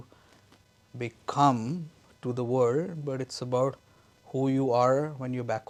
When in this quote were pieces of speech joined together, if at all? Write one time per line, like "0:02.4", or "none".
none